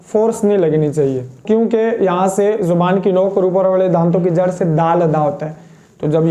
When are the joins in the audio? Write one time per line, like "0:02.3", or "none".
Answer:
0:01.4